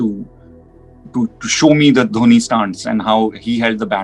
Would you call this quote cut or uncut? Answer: uncut